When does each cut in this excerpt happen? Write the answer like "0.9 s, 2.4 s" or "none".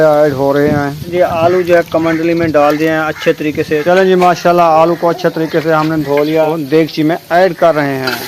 1.1 s, 3.8 s, 6.5 s

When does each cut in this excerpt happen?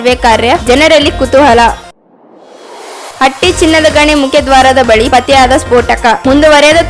none

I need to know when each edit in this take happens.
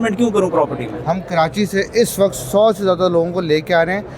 0.9 s

